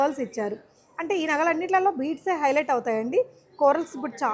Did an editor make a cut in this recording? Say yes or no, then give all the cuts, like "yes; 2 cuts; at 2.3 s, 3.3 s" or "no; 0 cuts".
no; 0 cuts